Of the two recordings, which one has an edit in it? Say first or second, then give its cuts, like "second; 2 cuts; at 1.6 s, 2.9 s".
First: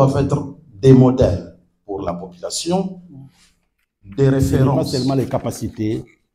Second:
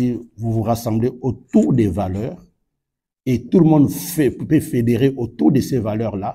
first; 1 cut; at 4.8 s